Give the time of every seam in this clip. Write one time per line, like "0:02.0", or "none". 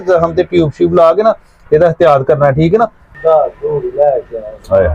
0:03.1